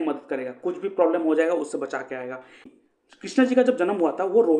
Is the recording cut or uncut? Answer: cut